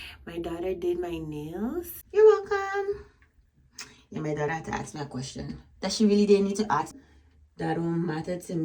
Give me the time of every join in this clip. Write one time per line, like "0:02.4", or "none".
0:02.0
0:06.9